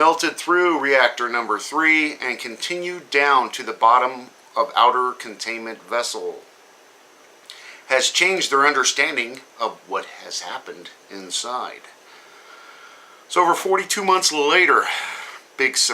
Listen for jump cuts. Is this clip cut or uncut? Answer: cut